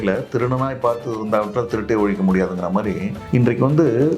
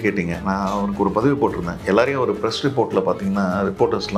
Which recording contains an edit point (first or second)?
first